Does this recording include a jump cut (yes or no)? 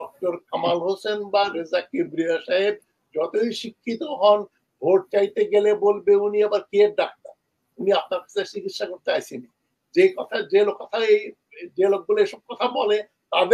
no